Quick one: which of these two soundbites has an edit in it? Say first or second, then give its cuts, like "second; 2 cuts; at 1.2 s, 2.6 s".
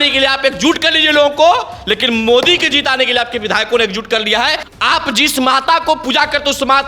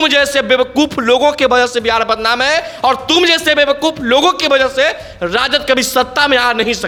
first; 1 cut; at 4.6 s